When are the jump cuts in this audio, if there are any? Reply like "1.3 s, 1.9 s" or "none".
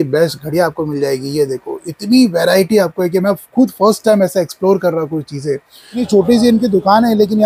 6.1 s